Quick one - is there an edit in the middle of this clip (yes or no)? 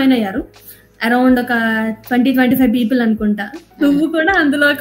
no